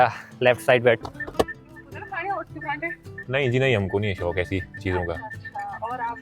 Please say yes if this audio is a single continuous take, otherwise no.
no